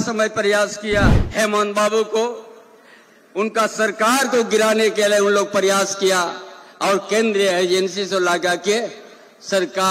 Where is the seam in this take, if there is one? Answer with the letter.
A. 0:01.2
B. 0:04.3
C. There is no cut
A